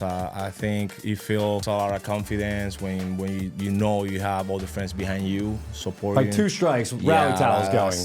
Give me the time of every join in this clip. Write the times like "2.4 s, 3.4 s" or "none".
1.6 s